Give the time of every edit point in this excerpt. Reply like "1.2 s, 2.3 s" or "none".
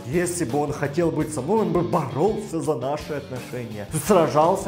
none